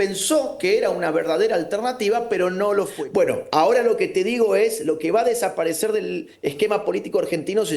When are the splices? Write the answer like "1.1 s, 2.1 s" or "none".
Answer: 3.0 s